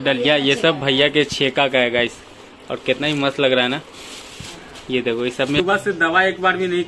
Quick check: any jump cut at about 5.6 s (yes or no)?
yes